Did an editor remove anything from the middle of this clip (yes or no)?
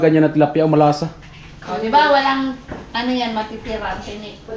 no